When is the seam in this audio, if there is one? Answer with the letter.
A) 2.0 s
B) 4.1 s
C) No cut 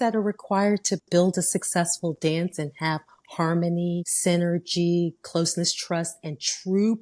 B